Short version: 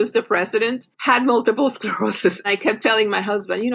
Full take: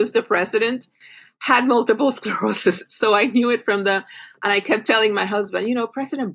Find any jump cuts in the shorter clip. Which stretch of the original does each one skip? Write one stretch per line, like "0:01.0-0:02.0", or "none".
0:00.9-0:01.3
0:02.9-0:04.5